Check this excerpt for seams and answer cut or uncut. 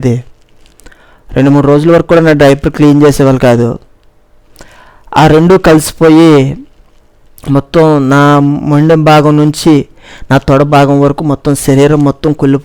uncut